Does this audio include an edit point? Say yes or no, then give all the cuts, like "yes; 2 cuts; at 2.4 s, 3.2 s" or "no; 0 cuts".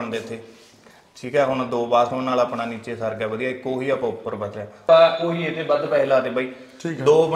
no; 0 cuts